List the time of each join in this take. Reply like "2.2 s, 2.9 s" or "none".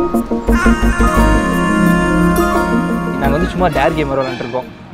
3.1 s